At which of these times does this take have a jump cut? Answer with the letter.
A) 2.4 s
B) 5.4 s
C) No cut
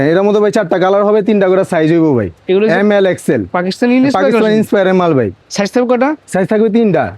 B